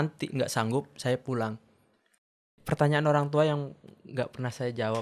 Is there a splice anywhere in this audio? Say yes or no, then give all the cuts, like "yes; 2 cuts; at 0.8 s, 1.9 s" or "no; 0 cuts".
yes; 1 cut; at 2.5 s